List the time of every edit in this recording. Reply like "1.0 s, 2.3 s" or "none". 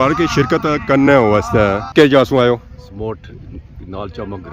1.8 s